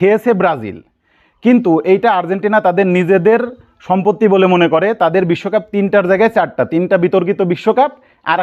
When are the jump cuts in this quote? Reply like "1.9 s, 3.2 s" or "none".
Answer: none